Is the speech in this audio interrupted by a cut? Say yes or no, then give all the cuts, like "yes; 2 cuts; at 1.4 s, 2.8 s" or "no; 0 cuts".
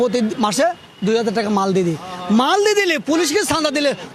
no; 0 cuts